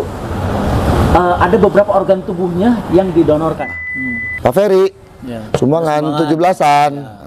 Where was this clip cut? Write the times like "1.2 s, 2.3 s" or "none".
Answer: 3.7 s